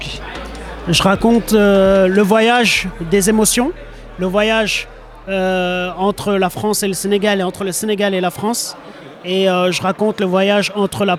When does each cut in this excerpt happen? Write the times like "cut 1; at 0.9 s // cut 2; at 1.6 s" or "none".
none